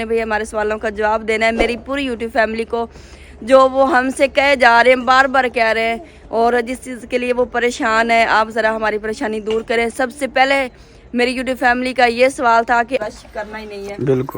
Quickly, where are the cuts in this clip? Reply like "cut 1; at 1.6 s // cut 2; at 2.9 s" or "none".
cut 1; at 13.0 s